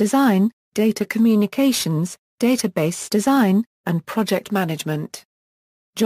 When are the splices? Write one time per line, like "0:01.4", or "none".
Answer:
none